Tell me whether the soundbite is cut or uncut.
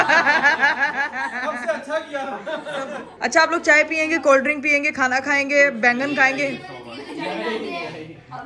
uncut